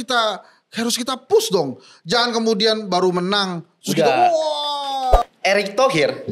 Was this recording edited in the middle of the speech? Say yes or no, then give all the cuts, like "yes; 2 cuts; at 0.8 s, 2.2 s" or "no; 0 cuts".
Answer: yes; 1 cut; at 5.2 s